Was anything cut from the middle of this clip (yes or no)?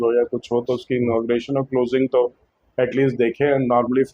no